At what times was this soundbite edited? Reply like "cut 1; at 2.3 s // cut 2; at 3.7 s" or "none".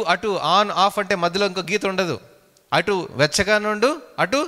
none